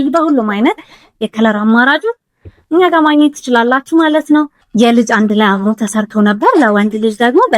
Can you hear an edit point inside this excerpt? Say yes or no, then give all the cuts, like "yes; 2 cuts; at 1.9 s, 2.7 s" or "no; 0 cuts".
yes; 1 cut; at 4.6 s